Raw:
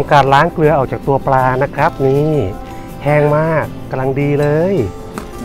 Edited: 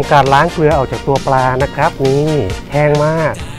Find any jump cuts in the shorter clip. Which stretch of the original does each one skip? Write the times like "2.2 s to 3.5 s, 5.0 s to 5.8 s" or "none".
2.6 s to 2.9 s